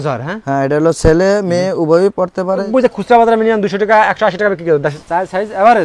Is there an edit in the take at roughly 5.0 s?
yes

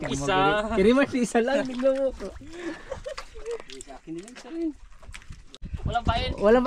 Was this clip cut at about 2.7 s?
no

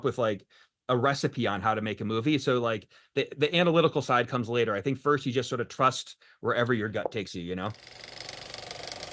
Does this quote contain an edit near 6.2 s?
no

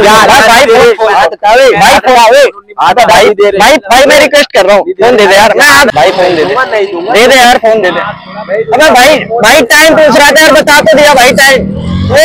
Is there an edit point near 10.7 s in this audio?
yes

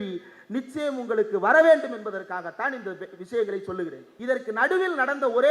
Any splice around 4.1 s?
yes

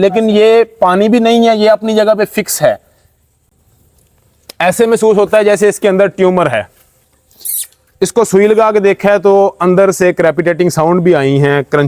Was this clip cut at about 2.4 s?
no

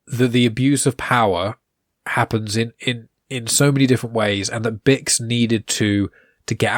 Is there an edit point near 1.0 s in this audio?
no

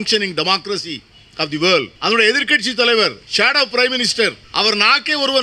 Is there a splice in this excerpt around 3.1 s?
no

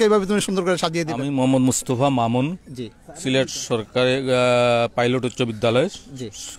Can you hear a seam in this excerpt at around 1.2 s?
yes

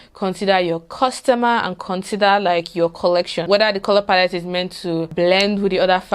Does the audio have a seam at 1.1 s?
no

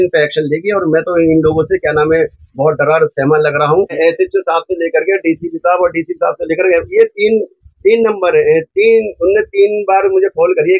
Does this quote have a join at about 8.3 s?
no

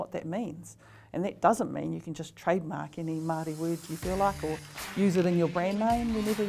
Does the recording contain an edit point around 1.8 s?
no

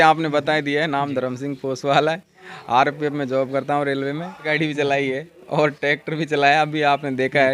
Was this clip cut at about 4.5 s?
yes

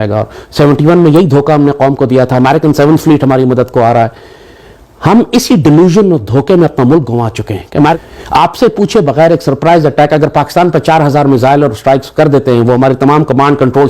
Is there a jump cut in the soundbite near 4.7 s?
no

